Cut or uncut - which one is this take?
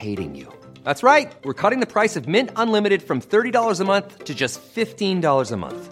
uncut